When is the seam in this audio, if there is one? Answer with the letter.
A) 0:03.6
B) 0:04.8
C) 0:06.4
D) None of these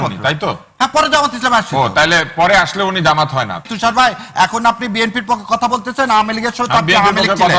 A